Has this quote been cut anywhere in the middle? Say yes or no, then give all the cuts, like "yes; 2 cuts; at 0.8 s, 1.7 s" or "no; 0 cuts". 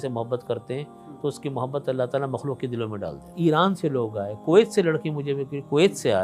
yes; 1 cut; at 3.2 s